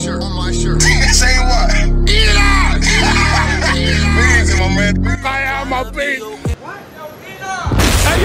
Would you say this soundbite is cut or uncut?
uncut